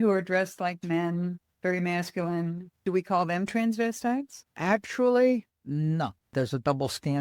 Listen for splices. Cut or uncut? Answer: cut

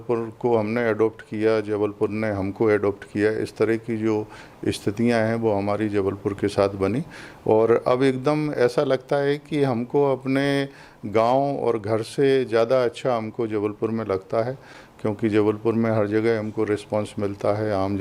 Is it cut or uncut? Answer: uncut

